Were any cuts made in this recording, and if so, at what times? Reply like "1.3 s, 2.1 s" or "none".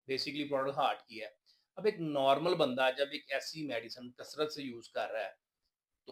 none